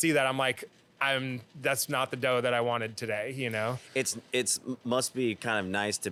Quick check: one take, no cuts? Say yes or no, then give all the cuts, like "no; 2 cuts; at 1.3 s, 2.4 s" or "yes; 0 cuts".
yes; 0 cuts